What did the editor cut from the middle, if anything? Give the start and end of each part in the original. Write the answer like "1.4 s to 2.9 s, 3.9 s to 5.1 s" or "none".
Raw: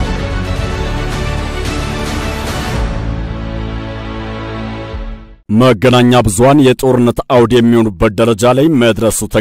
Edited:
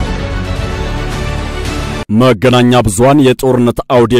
2.0 s to 5.4 s